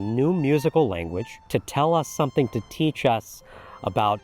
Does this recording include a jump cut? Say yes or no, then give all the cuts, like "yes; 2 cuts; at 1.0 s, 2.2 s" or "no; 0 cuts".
no; 0 cuts